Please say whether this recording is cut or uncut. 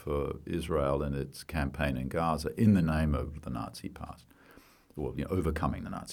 uncut